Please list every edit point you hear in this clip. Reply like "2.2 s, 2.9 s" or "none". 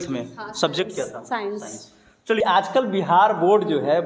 2.4 s